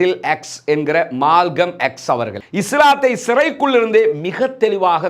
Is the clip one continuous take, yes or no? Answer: no